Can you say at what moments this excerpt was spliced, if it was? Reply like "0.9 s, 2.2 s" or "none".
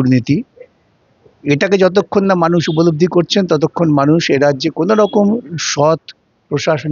none